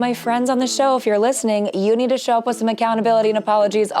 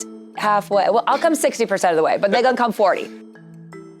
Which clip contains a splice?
second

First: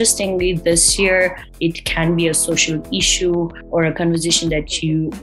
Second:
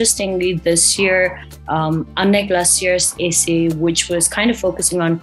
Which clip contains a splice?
first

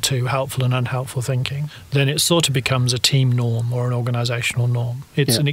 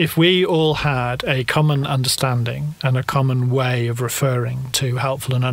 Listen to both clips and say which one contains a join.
first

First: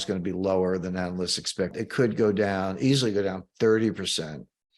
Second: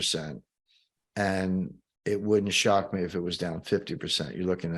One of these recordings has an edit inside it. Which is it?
first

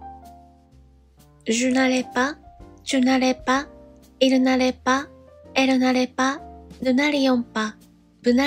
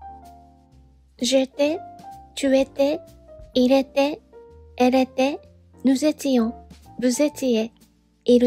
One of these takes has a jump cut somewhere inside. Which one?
second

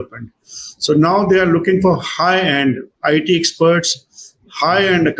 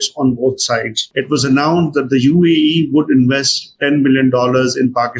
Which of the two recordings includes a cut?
second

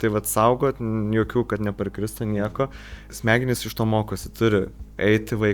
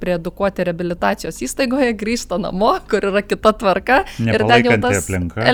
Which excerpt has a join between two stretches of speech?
first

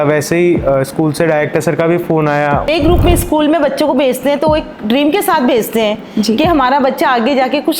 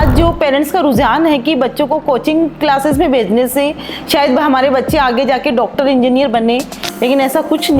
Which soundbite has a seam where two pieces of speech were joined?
first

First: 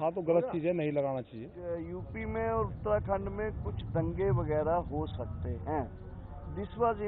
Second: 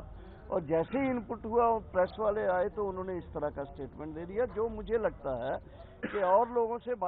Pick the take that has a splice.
first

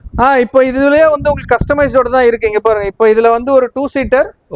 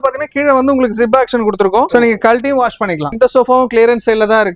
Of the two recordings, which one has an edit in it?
second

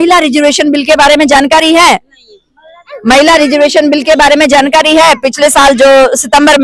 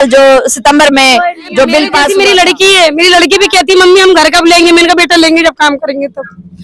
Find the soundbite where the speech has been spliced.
second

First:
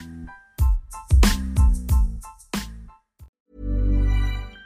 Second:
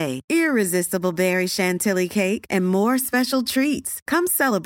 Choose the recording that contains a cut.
first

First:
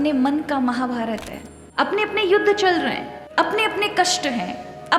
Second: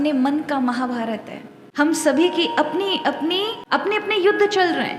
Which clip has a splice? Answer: first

